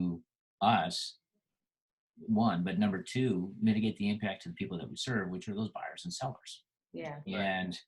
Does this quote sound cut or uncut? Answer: uncut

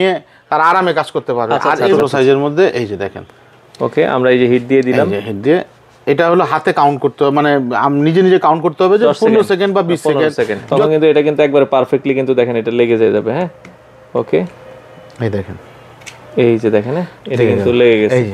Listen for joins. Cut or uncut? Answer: cut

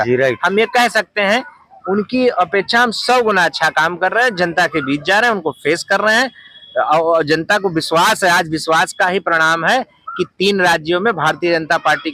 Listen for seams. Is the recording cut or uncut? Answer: uncut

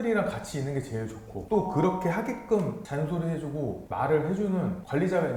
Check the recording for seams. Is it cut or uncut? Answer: uncut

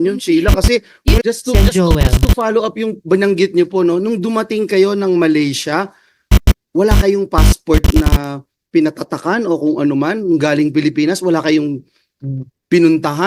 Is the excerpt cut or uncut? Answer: cut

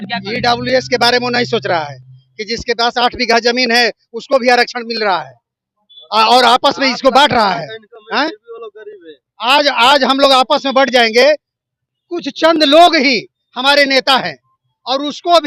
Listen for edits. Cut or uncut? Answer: uncut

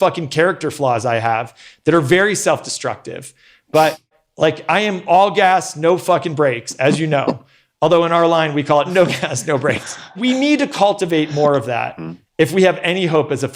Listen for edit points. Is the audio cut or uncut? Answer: cut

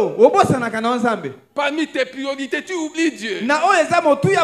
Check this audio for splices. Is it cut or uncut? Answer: uncut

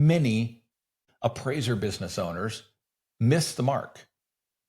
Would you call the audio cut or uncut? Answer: cut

